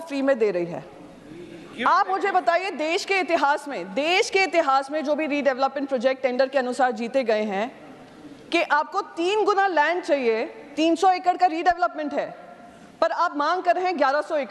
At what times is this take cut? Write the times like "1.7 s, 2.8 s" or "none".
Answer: none